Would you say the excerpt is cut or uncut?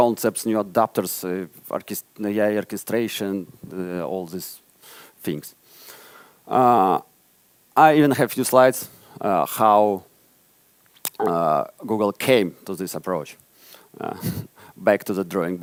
uncut